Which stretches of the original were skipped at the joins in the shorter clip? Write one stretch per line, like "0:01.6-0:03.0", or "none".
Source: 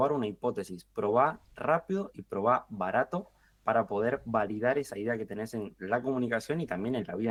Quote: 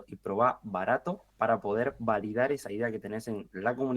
0:03.3-0:03.5